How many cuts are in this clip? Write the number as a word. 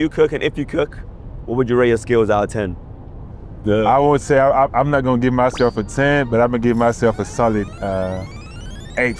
zero